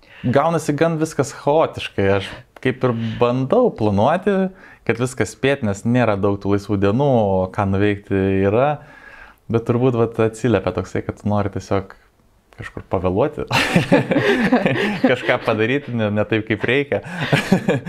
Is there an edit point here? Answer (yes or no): no